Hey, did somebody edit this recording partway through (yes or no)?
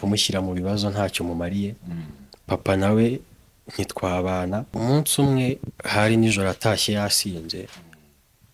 yes